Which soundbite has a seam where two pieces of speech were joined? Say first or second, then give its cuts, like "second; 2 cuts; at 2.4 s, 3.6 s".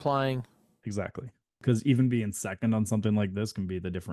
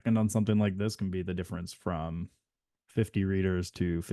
first; 1 cut; at 1.6 s